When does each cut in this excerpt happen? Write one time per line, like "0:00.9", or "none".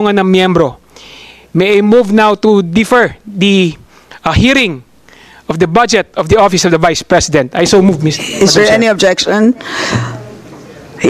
none

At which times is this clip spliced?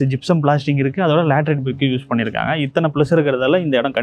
none

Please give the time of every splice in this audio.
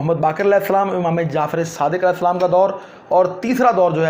none

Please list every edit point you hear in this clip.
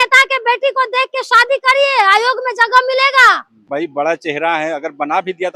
0:03.7

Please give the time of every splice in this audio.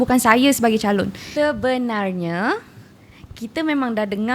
0:01.2

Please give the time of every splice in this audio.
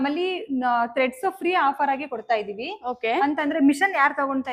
none

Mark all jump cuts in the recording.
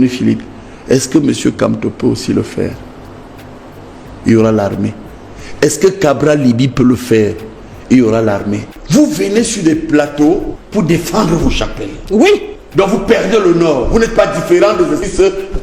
0:08.7

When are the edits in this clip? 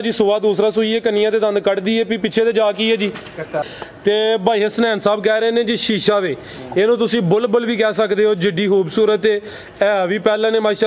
0:03.7

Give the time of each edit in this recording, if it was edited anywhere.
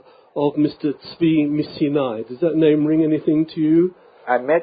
none

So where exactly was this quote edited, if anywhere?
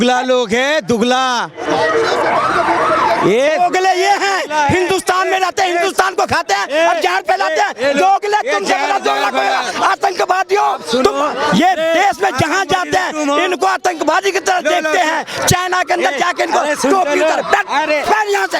none

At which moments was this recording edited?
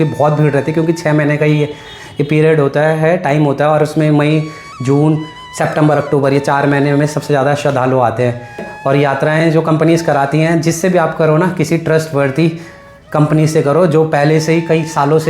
0:08.7

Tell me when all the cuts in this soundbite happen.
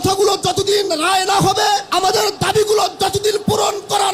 0:01.9

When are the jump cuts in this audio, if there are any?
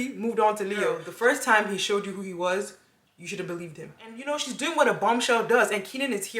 0:01.0
0:04.1

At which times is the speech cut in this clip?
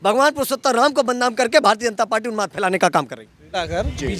none

